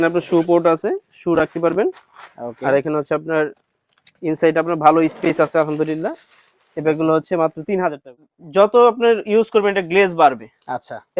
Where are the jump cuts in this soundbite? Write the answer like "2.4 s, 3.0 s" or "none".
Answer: 8.3 s